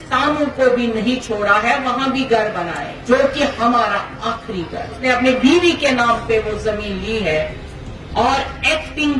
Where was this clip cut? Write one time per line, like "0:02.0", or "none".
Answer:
0:02.9
0:05.0